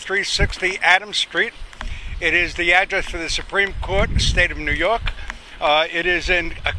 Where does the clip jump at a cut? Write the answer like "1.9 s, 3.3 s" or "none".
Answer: 4.9 s